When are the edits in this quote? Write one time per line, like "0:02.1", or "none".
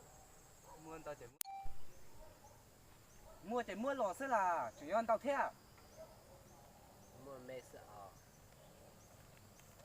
0:01.3

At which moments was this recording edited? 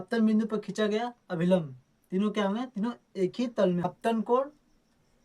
0:03.8

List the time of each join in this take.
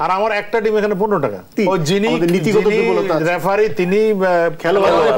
0:01.5

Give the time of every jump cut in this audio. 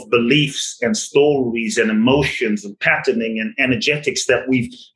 none

